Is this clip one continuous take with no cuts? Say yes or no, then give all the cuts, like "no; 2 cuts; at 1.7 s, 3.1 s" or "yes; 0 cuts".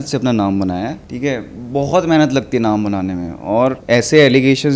no; 2 cuts; at 1.0 s, 3.8 s